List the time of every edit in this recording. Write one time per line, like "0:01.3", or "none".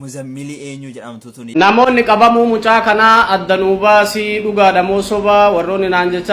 0:01.5